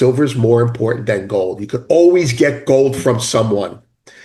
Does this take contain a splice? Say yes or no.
no